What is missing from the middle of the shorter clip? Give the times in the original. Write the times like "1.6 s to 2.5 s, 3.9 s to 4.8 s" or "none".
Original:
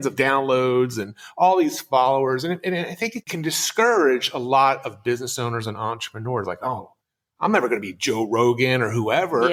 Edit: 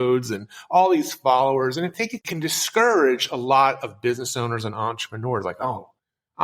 2.6 s to 2.9 s